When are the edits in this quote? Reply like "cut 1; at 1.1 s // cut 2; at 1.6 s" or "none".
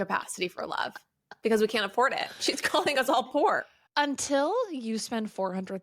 cut 1; at 3.8 s